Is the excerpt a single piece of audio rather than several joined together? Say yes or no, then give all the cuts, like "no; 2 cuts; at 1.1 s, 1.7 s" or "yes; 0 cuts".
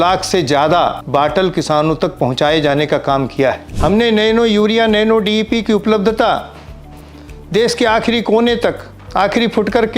no; 2 cuts; at 1.0 s, 3.7 s